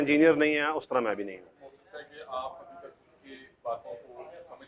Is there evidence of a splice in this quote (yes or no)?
no